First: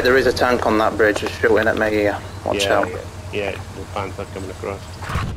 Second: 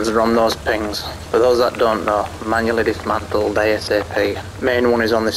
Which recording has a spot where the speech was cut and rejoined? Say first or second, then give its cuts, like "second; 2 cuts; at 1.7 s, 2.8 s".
second; 1 cut; at 4.5 s